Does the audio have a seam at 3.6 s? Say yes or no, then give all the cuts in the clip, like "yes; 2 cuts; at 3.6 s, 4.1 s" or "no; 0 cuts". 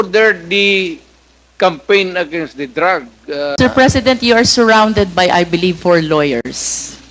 yes; 1 cut; at 3.6 s